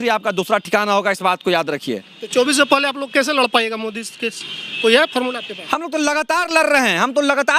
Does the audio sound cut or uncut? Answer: uncut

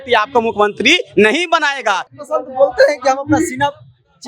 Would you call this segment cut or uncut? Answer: cut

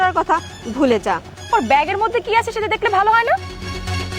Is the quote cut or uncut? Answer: cut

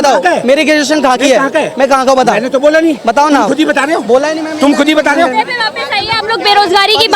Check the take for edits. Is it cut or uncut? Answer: uncut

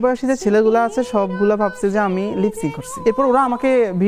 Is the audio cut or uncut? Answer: cut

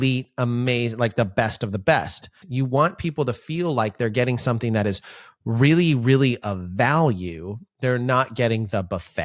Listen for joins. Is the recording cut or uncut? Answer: cut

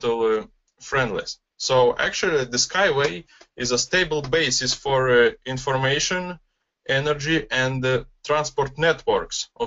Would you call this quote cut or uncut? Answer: cut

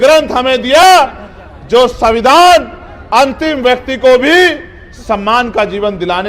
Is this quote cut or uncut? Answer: uncut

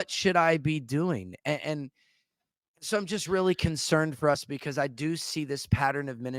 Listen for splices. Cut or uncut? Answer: uncut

